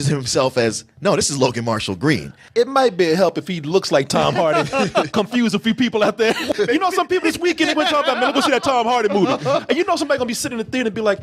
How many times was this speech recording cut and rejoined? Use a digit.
2